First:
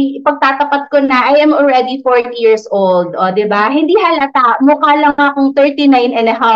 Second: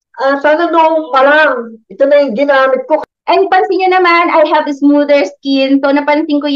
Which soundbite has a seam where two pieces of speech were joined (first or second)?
second